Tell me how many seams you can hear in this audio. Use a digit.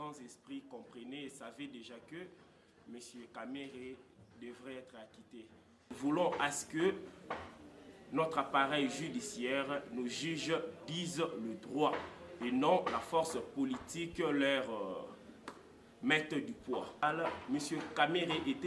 2